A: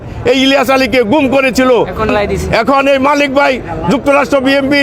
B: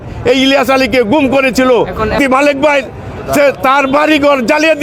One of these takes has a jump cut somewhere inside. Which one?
B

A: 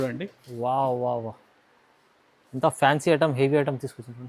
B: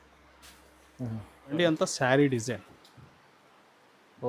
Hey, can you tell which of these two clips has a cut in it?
B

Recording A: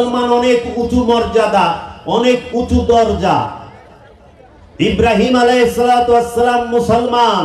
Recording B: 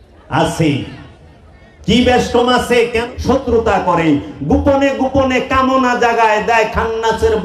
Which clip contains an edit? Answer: B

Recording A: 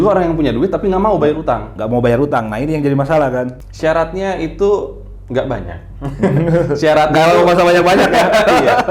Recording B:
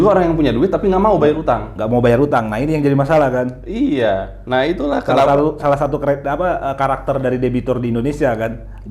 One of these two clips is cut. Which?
A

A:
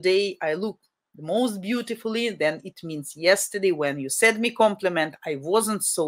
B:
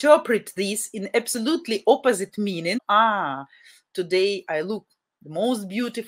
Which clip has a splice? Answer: B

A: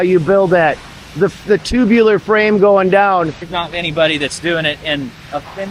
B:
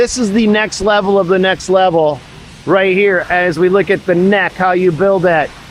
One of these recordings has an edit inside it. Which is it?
A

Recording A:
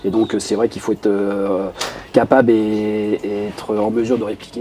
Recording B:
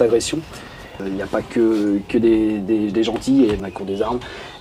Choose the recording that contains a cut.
B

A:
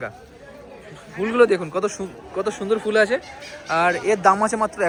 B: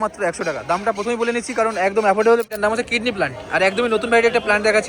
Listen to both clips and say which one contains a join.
B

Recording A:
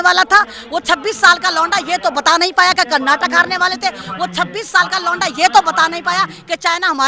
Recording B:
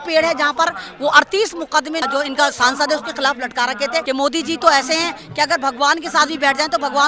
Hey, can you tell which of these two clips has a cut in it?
B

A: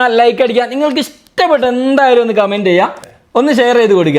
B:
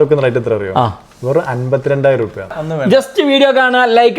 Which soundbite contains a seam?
B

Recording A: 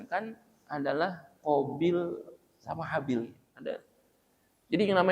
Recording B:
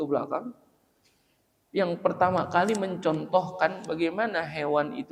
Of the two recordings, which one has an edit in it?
A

